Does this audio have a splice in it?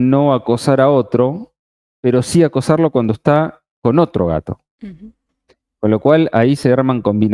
no; 0 cuts

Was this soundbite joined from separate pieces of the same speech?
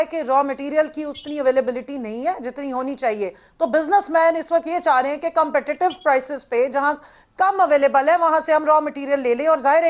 no; 0 cuts

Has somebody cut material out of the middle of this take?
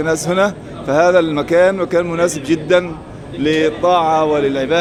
no; 0 cuts

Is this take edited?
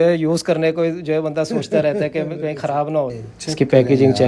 yes; 1 cut; at 3.3 s

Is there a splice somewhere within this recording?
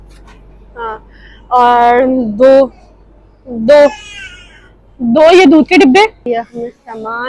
yes; 1 cut; at 6.3 s

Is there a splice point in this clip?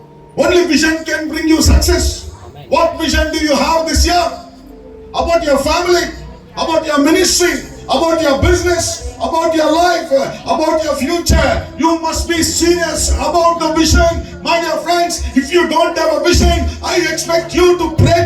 no; 0 cuts

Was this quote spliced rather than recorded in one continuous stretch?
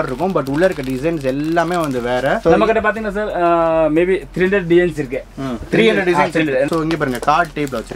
yes; 2 cuts; at 2.4 s, 6.7 s

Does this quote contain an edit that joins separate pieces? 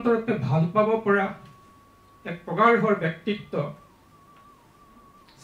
no; 0 cuts

